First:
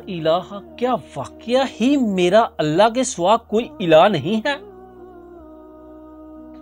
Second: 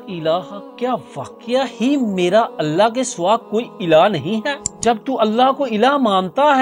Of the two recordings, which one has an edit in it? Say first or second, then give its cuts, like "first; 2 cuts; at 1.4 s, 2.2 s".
second; 1 cut; at 4.7 s